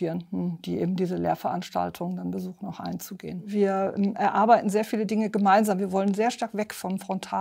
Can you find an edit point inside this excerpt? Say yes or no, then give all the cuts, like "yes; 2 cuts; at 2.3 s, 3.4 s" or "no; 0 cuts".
yes; 1 cut; at 3.5 s